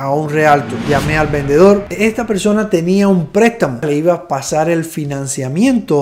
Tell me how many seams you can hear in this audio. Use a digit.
3